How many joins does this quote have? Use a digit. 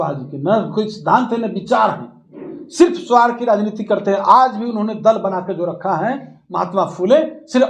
0